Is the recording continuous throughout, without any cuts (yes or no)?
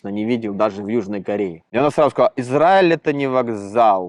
no